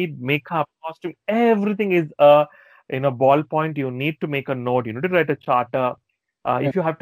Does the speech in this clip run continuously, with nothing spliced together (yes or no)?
yes